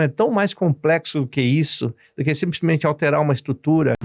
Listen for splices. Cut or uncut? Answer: uncut